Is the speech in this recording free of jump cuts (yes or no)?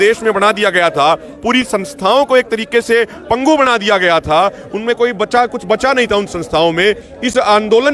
yes